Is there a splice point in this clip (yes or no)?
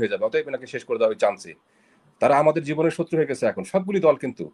no